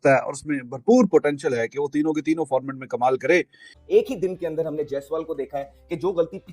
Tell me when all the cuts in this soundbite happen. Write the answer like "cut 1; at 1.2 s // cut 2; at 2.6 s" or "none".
cut 1; at 3.7 s